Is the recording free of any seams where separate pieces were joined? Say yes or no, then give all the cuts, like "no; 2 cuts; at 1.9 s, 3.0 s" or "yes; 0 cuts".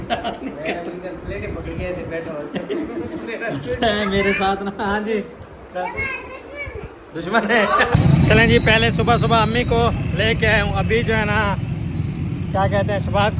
no; 1 cut; at 7.9 s